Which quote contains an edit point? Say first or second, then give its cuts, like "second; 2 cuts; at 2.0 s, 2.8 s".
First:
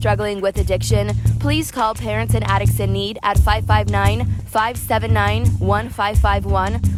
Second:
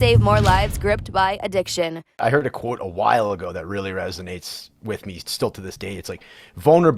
second; 1 cut; at 2.2 s